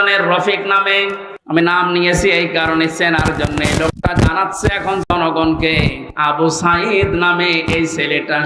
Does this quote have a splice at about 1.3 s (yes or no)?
yes